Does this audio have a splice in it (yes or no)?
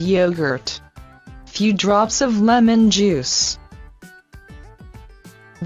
no